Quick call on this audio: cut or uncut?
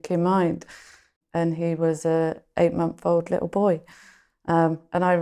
cut